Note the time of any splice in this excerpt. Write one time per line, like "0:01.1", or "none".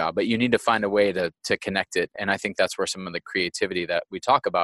0:02.2